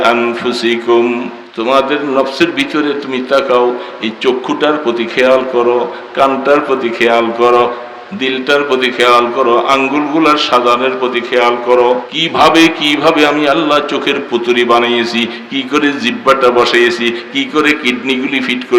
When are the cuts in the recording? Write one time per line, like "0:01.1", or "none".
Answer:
0:01.4
0:12.1